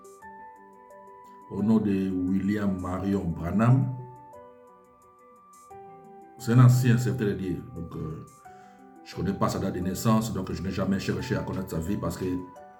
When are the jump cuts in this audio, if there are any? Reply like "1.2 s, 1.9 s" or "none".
none